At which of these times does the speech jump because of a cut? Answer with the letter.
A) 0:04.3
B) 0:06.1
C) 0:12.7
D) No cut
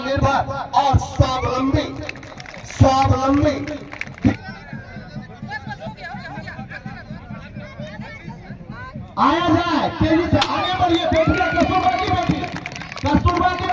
A